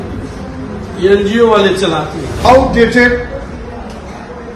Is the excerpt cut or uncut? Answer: cut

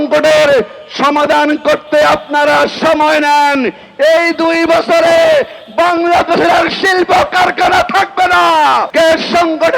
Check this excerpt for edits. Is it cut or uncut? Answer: cut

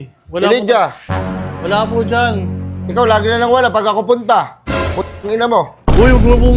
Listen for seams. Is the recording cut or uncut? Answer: uncut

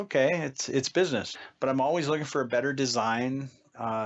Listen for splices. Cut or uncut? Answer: cut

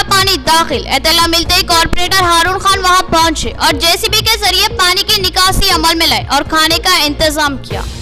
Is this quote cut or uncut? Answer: uncut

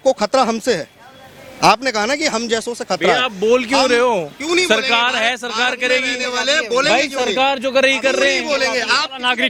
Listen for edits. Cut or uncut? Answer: uncut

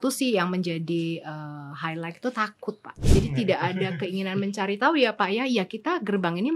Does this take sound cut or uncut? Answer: cut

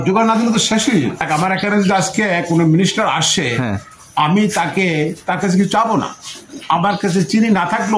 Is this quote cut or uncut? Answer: cut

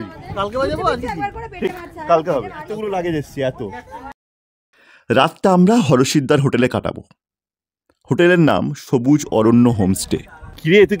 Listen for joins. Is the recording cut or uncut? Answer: uncut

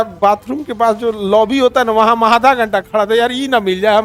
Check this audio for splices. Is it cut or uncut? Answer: uncut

